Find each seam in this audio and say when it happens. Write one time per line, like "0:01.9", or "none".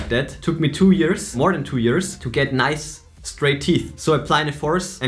none